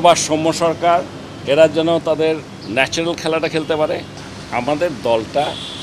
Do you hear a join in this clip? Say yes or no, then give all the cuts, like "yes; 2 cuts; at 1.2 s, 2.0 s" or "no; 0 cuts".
yes; 1 cut; at 4.1 s